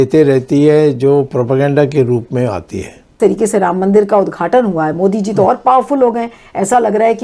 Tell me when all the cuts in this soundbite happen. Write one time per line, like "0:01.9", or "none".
0:03.1